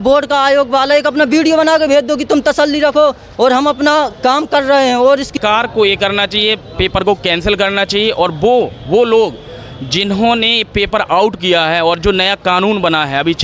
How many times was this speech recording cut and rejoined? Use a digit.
1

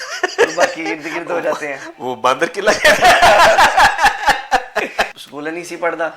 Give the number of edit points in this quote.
1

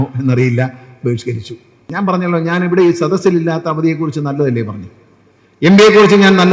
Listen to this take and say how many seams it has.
1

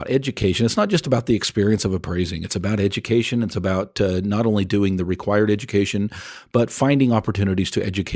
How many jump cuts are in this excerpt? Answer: 0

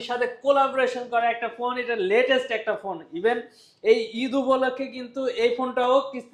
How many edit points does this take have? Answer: 0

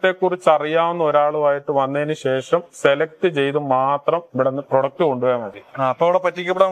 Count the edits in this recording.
0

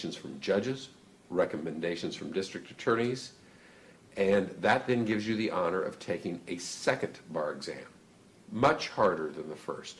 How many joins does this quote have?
0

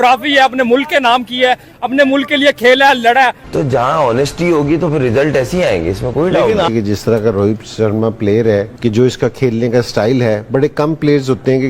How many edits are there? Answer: 2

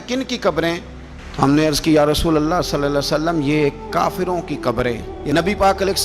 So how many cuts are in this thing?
1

